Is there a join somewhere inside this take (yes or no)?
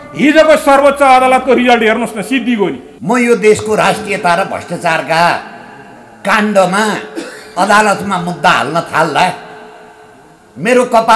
yes